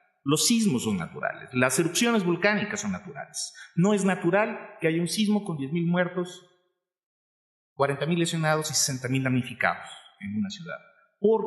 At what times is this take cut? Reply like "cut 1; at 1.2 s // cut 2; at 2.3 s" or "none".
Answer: cut 1; at 10.4 s